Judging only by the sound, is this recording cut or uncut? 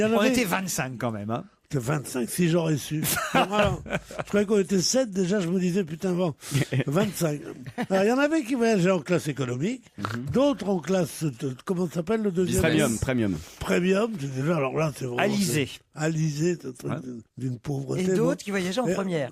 cut